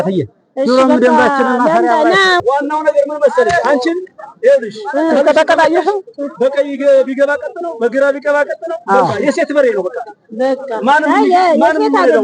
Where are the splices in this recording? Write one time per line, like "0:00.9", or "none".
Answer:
0:02.4